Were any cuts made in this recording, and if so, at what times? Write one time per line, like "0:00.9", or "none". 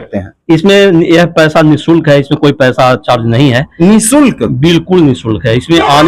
none